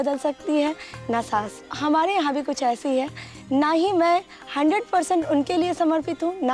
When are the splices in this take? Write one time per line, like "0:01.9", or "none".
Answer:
none